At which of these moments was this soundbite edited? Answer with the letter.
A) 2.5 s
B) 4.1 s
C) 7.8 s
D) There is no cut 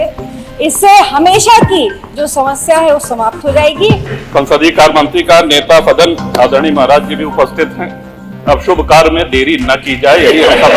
B